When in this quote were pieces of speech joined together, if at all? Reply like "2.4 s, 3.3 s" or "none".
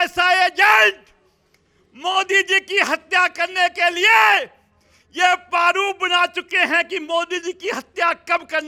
none